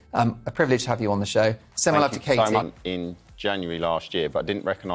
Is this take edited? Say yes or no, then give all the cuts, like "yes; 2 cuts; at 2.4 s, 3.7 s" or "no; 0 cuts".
yes; 1 cut; at 2.8 s